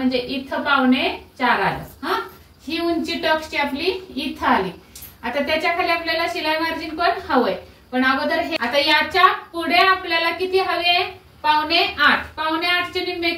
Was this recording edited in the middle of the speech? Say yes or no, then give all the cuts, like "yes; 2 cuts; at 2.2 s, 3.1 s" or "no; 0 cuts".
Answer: yes; 1 cut; at 8.5 s